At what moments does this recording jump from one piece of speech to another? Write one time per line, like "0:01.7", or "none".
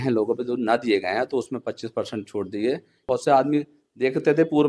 0:03.0